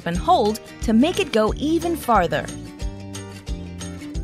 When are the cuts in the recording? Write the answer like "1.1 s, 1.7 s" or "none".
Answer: 2.6 s